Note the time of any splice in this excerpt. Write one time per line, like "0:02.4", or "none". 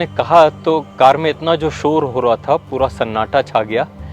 none